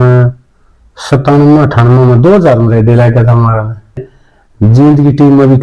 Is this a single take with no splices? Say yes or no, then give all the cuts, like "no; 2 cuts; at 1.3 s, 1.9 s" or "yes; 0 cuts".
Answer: no; 1 cut; at 4.0 s